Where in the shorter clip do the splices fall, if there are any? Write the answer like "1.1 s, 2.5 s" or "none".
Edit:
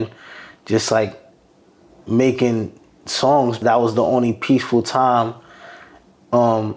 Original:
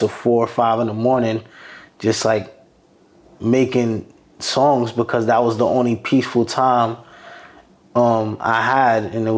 3.6 s